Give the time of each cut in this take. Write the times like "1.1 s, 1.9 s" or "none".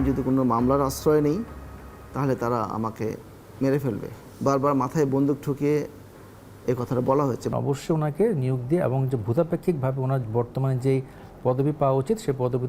7.5 s